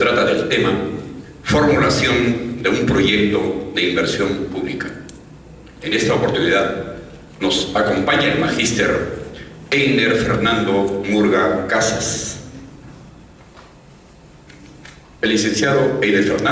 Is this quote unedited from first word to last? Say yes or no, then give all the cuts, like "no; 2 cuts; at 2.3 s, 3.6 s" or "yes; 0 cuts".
no; 1 cut; at 10.2 s